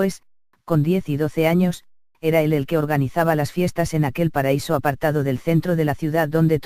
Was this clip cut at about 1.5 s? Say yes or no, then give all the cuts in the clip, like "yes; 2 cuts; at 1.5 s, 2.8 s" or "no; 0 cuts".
no; 1 cut; at 5.4 s